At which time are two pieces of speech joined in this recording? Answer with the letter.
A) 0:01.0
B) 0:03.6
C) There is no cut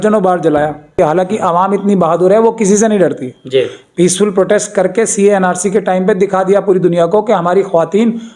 A